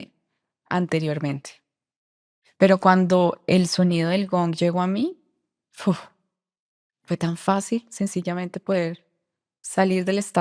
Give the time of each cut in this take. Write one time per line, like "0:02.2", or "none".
none

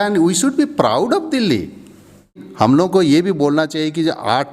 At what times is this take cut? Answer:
0:02.4

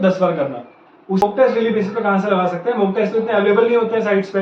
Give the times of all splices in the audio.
0:01.2

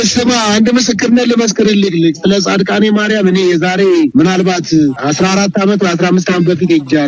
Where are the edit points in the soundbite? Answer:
0:04.1
0:05.0

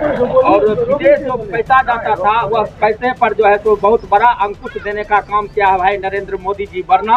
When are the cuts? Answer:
none

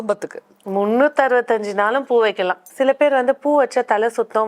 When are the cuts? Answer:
0:02.6

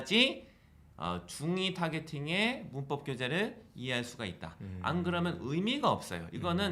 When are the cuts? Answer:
none

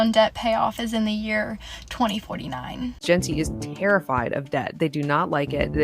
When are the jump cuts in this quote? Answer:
0:03.0

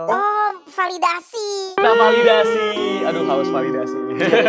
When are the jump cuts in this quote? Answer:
none

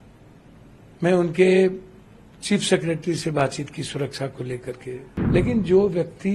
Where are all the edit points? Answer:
0:05.1

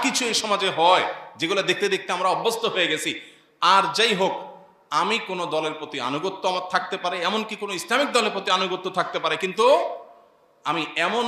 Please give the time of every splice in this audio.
none

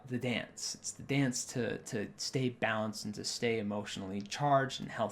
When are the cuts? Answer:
none

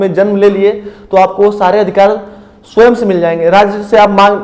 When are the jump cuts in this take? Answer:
none

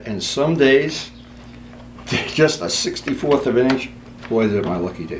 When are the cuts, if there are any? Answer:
none

